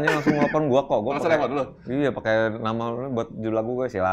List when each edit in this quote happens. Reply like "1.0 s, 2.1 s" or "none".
none